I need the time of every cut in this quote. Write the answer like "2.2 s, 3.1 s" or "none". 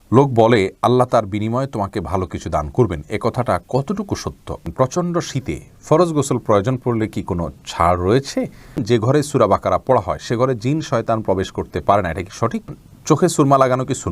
4.6 s, 8.8 s, 12.7 s